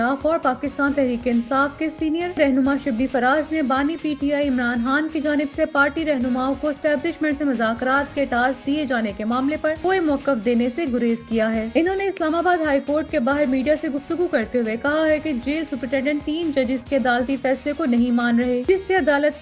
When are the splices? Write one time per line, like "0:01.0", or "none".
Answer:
none